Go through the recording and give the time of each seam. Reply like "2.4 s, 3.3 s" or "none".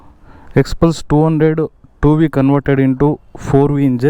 none